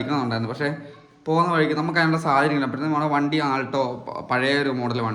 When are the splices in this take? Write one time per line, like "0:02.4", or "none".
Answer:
none